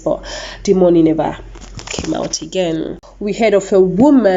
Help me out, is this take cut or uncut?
cut